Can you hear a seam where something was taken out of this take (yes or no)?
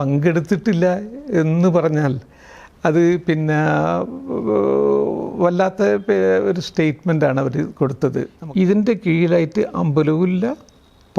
yes